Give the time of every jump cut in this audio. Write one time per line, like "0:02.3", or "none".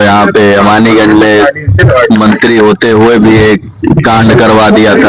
none